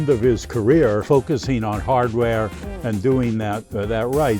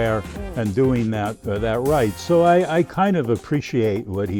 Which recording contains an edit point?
first; 1 cut; at 1.0 s

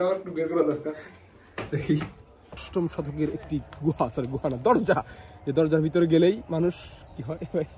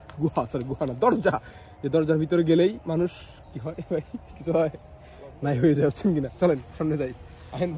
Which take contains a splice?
first; 1 cut; at 2.6 s

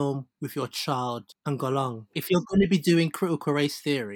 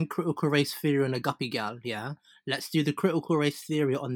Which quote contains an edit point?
first; 2 cuts; at 1.3 s, 2.2 s

